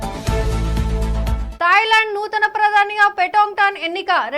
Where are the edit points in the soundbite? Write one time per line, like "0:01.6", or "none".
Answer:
0:01.4